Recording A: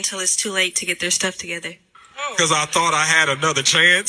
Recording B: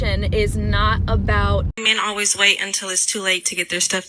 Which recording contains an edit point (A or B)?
B